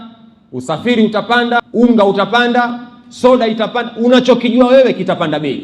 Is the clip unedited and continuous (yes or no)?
no